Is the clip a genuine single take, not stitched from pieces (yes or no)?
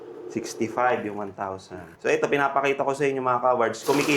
no